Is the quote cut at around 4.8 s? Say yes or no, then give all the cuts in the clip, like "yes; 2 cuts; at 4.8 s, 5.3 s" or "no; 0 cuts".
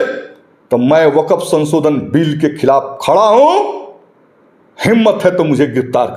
no; 0 cuts